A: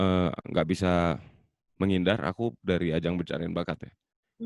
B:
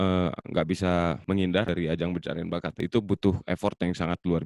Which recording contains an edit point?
B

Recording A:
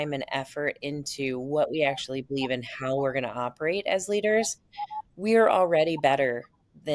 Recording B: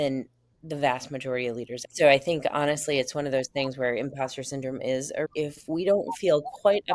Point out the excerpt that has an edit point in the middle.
B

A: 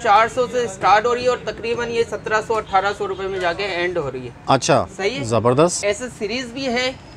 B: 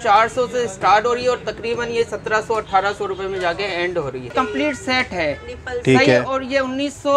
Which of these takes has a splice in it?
B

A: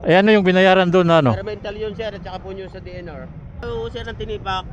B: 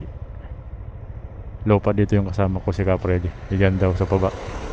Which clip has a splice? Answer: A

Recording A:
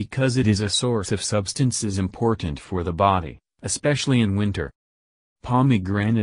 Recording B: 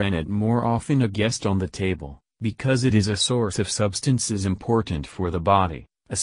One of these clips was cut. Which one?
A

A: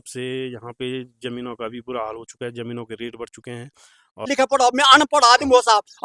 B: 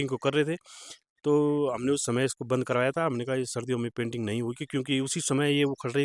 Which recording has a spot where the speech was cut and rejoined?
A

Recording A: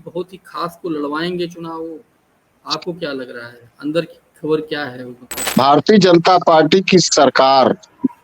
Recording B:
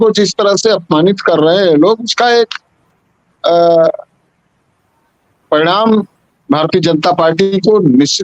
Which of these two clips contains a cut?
A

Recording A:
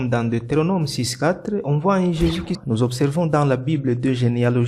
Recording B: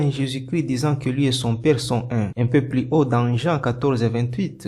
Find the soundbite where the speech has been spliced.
A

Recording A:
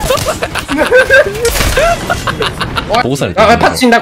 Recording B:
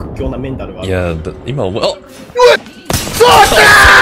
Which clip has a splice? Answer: A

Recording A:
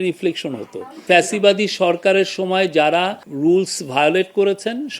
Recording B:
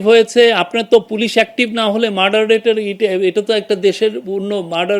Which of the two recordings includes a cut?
A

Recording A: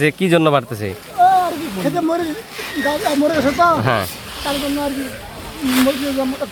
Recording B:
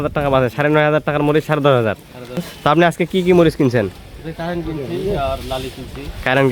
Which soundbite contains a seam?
B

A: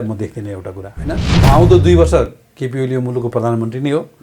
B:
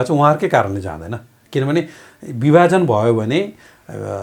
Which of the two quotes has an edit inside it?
A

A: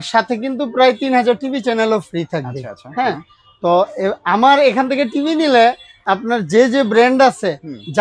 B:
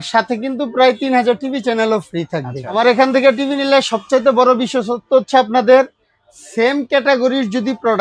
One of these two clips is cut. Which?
B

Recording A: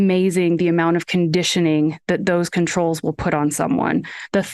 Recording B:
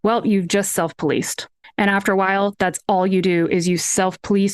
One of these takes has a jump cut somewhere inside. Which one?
B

